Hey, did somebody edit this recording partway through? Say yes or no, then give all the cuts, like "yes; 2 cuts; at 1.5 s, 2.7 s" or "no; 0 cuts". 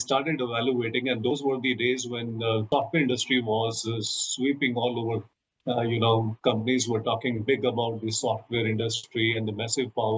yes; 2 cuts; at 2.7 s, 5.5 s